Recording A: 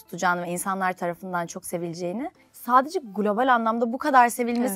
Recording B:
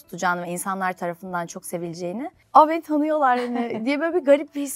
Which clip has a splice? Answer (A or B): B